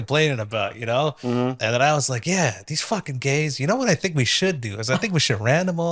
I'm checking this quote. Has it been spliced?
no; 0 cuts

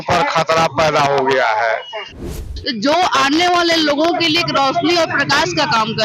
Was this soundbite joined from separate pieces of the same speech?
yes; 1 cut; at 2.2 s

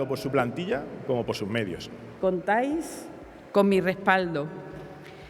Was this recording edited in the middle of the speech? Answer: yes; 1 cut; at 2.2 s

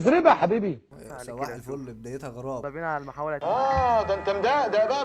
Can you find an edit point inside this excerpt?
yes; 2 cuts; at 0.9 s, 2.6 s

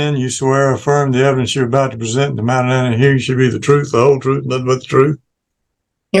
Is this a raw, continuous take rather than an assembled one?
yes; 0 cuts

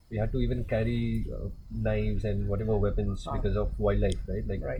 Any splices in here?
no; 0 cuts

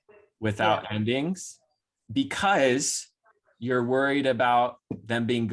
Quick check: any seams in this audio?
no; 0 cuts

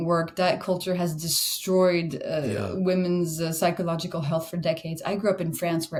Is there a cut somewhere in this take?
no; 0 cuts

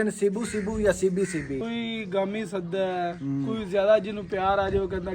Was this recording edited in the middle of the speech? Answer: yes; 1 cut; at 1.6 s

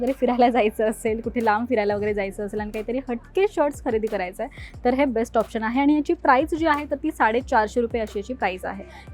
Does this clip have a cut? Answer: no; 0 cuts

